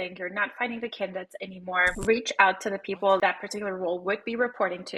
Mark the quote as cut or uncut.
cut